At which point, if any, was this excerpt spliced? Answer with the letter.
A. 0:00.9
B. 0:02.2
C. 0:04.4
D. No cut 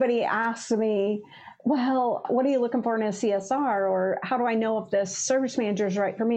B